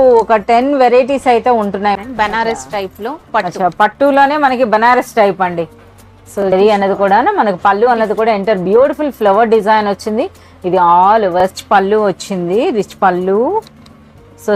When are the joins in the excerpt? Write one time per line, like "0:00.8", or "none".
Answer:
0:02.0
0:06.4
0:11.5